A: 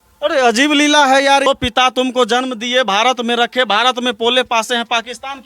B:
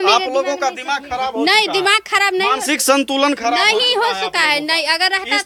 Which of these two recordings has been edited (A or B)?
A